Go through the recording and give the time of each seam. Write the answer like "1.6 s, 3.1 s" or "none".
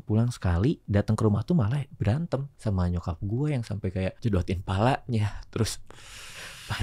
0.8 s, 2.5 s, 4.2 s

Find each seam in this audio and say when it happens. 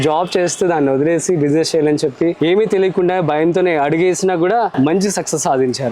2.4 s, 4.7 s

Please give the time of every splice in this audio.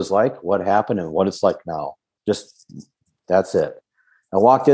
none

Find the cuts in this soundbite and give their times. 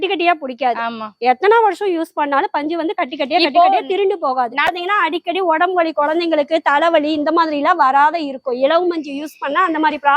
4.7 s

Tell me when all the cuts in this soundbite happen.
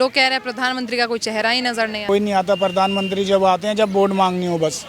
2.1 s

